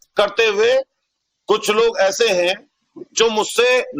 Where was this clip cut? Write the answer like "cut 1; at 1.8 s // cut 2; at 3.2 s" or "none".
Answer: none